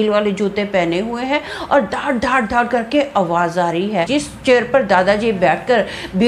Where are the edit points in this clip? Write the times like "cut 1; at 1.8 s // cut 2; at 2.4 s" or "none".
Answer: cut 1; at 4.1 s